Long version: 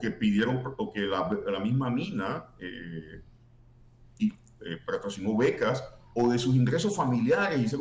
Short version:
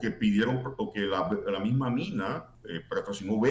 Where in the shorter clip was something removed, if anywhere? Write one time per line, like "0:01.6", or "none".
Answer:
0:02.5